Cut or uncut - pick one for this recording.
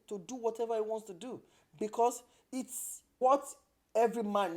cut